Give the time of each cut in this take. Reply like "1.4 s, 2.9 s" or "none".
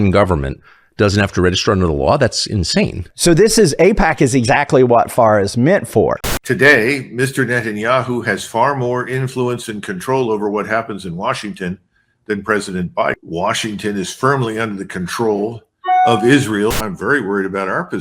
6.2 s, 16.8 s